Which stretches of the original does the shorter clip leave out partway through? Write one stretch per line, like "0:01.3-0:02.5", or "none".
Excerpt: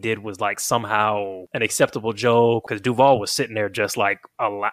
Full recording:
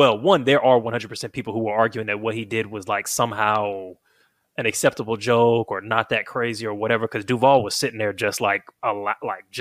0:03.9-0:04.5
0:05.7-0:07.1